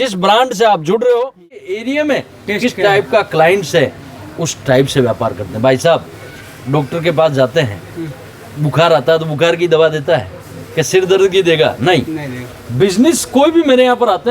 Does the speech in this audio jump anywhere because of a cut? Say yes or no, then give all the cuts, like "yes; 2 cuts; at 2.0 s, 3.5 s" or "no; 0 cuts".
yes; 1 cut; at 1.7 s